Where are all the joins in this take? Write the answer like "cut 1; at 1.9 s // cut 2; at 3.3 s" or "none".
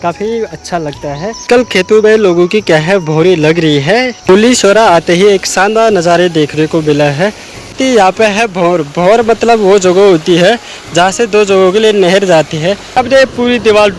cut 1; at 1.8 s // cut 2; at 4.6 s // cut 3; at 8.0 s // cut 4; at 13.0 s